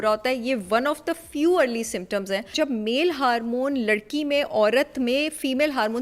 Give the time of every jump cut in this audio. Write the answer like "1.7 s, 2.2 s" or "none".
2.5 s